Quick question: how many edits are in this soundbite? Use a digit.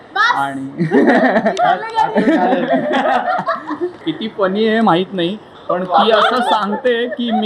1